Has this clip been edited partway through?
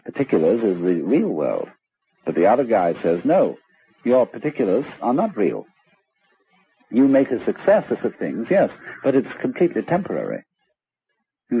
no; 0 cuts

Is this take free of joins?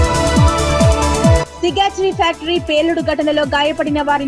no; 1 cut; at 1.4 s

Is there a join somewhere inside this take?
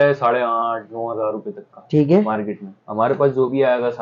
no; 0 cuts

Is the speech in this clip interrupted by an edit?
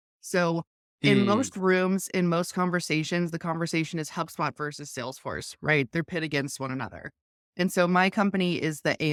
no; 0 cuts

